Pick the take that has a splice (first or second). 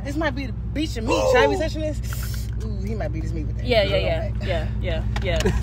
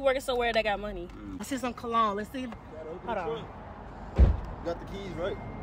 second